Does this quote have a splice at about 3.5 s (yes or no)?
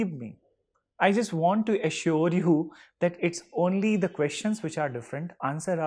no